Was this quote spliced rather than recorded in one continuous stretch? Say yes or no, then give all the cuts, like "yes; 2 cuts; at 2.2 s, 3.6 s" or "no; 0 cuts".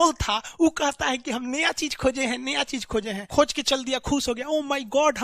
yes; 1 cut; at 3.2 s